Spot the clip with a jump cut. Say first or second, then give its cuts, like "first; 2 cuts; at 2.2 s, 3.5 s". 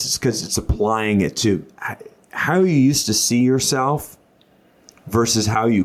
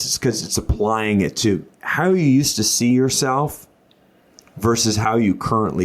second; 1 cut; at 1.8 s